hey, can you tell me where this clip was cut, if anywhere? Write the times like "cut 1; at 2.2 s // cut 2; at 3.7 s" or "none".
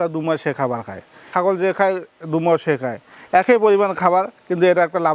cut 1; at 1.3 s